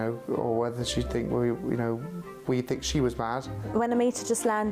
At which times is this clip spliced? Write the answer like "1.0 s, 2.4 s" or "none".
3.7 s